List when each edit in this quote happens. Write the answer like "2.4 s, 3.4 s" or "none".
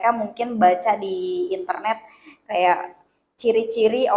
none